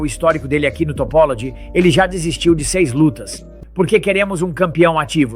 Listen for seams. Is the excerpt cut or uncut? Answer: cut